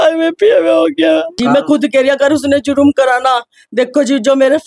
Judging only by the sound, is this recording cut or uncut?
cut